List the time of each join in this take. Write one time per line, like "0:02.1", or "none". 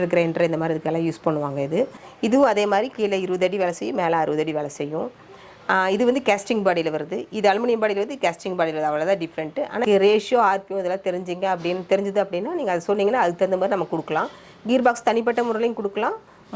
0:02.0
0:09.8